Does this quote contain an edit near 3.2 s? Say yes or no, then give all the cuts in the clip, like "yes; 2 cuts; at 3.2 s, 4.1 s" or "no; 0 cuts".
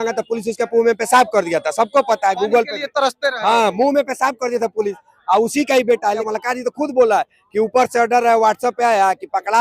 no; 1 cut; at 6.2 s